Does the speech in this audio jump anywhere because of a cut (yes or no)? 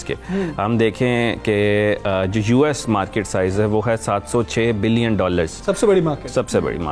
no